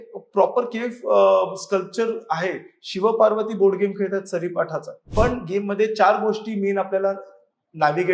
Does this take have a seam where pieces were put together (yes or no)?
yes